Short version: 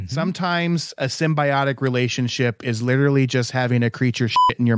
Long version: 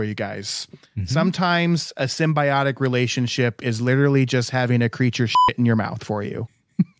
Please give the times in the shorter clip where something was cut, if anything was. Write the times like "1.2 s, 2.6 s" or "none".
none